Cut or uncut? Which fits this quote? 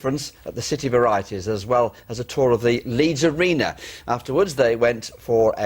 cut